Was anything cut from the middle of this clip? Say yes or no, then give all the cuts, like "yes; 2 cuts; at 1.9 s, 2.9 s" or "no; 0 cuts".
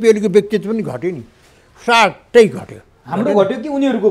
no; 0 cuts